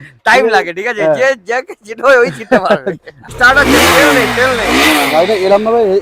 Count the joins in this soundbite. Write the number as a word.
one